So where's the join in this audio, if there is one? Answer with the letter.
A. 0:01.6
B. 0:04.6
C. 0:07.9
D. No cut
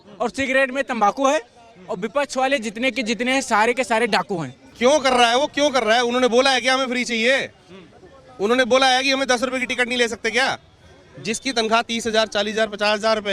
B